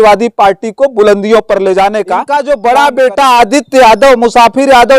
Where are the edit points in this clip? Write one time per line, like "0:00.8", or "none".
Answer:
0:02.2